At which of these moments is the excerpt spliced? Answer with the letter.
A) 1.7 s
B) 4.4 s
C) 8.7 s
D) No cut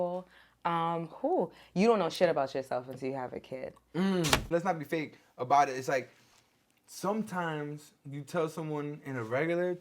B